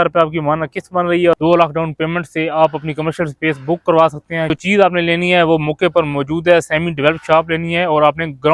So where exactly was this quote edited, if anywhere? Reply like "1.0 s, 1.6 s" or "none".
1.4 s, 4.5 s